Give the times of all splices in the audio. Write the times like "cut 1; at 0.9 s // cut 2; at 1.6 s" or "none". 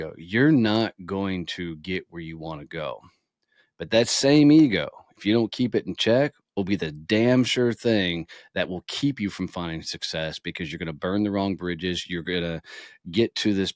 none